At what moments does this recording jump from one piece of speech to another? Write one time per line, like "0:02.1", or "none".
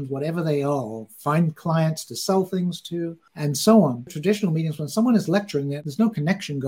0:04.1
0:05.7